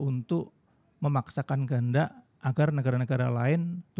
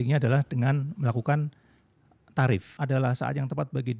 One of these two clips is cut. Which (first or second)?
second